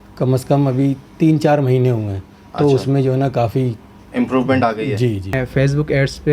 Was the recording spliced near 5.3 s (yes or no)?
yes